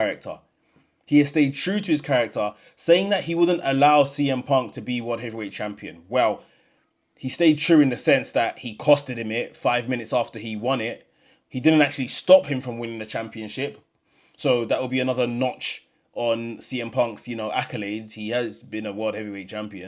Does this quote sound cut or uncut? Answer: uncut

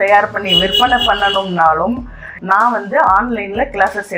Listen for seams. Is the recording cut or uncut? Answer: cut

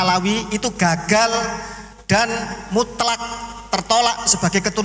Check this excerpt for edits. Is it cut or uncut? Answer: uncut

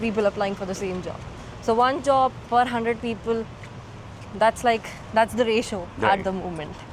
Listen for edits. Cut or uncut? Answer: uncut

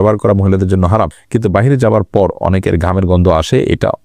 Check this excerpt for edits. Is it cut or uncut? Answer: cut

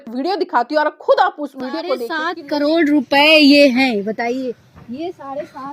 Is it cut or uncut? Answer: cut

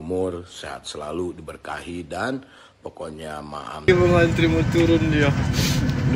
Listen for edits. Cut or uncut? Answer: cut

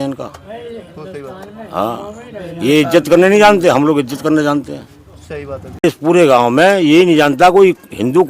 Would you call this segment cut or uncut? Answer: cut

